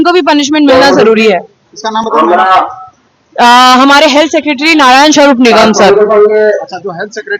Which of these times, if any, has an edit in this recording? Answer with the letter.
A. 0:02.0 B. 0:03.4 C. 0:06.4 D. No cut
D